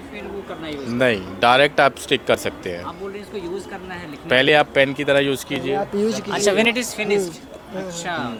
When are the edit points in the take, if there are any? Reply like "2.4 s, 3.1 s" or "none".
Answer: none